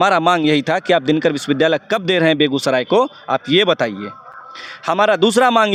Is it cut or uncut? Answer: uncut